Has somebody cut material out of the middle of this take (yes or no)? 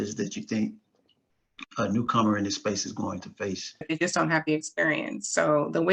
yes